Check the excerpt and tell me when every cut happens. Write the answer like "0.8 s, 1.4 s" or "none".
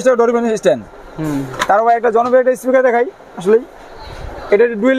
none